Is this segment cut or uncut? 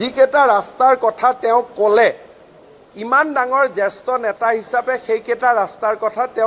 uncut